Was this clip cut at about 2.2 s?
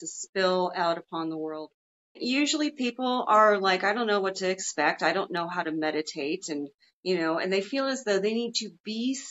yes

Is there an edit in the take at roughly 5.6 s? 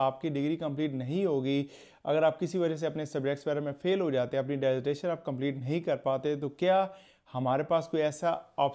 no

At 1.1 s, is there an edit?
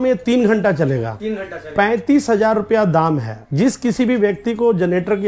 no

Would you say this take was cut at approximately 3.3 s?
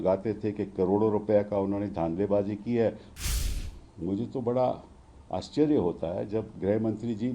yes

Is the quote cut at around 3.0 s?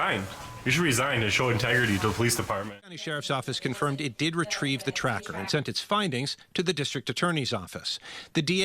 yes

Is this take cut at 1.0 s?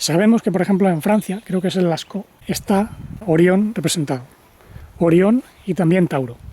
no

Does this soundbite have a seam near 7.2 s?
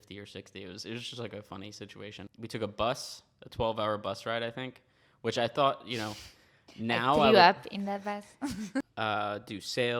no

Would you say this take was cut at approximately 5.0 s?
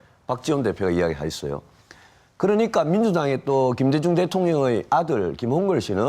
no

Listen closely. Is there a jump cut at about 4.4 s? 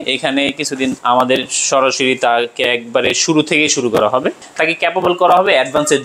yes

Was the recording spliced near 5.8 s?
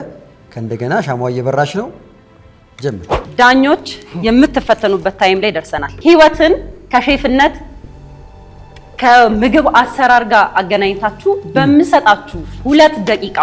yes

